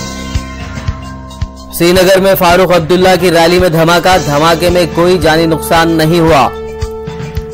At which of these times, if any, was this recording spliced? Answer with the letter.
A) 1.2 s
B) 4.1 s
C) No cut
A